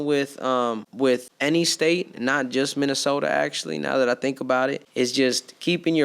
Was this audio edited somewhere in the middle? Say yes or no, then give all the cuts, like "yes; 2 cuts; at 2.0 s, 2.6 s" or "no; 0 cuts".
yes; 2 cuts; at 1.1 s, 4.8 s